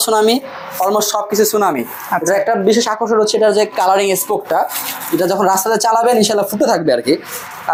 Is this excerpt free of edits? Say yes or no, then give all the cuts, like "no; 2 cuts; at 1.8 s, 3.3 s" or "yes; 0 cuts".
yes; 0 cuts